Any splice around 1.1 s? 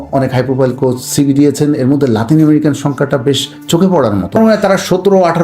no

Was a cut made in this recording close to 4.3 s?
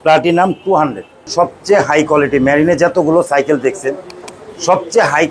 no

